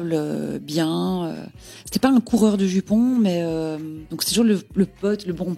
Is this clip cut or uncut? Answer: cut